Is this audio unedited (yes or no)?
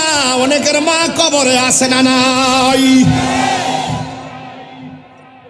yes